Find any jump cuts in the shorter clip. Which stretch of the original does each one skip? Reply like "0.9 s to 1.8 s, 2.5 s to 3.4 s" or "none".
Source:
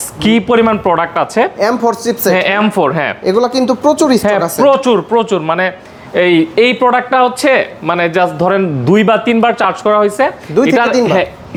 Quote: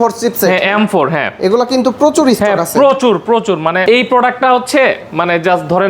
5.6 s to 6.5 s